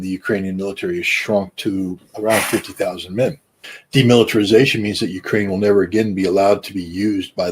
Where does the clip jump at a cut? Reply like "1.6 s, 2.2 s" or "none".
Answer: none